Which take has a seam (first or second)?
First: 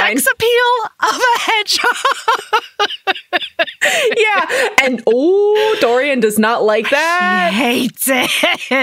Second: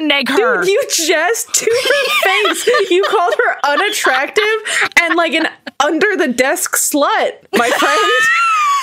second